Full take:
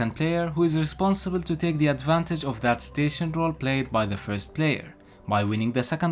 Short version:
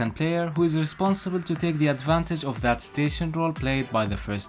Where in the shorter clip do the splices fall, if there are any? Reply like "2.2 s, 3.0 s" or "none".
none